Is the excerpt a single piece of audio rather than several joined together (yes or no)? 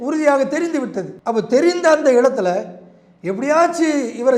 no